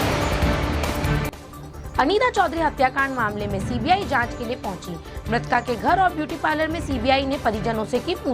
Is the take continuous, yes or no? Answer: no